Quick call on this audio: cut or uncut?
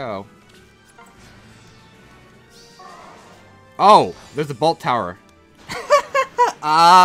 uncut